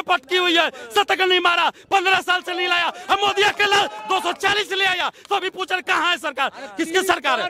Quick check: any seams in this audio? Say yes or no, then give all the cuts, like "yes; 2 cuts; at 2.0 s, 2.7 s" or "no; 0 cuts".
no; 0 cuts